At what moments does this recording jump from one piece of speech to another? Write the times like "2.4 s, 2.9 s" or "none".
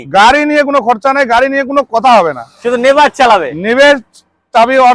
none